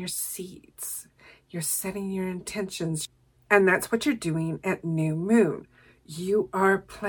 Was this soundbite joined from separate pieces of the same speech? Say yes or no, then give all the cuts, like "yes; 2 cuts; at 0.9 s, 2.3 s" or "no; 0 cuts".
yes; 1 cut; at 3.0 s